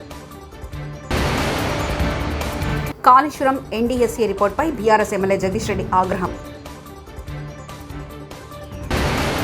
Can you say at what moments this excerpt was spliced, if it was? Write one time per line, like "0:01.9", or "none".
0:01.1
0:02.6